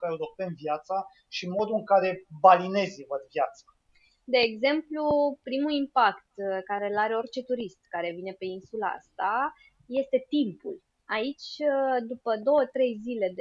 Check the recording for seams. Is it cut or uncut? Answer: uncut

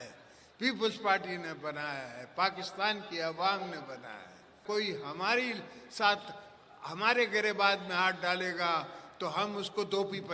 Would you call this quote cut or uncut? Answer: cut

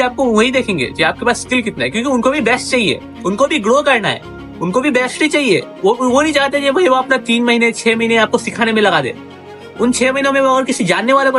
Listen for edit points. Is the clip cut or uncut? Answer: uncut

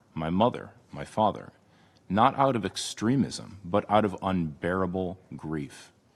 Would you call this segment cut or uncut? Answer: uncut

